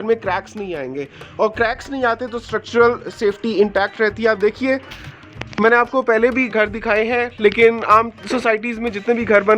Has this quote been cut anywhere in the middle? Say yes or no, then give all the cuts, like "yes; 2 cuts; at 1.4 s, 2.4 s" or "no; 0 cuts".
no; 0 cuts